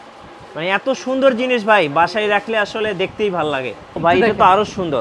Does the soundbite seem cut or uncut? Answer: cut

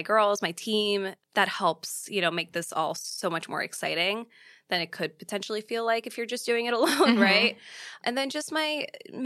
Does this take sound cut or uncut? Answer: cut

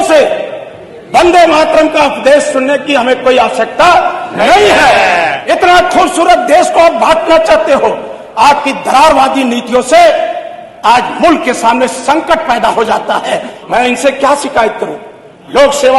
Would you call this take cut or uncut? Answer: cut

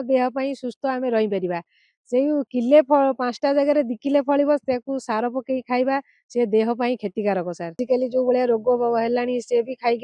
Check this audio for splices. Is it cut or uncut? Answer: cut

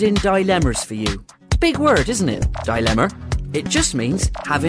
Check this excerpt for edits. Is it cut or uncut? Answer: uncut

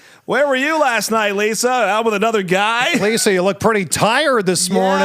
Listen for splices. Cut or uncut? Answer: uncut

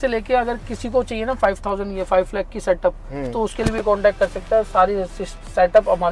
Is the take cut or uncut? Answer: uncut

